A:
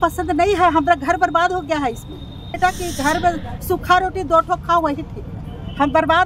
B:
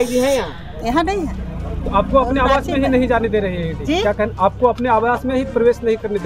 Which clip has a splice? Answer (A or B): A